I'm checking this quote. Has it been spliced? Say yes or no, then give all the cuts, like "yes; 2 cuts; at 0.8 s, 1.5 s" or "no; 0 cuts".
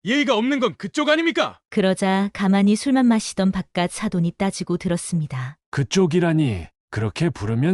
no; 0 cuts